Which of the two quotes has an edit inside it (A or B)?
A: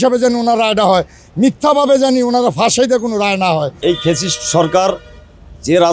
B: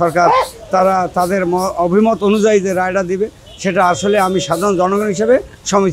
A